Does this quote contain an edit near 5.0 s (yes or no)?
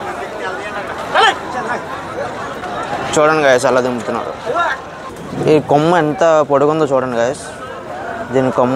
yes